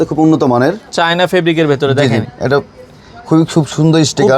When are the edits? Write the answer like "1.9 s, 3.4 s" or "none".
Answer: none